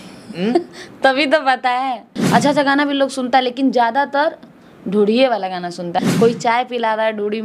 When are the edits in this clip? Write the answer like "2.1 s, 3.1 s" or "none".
2.1 s, 6.0 s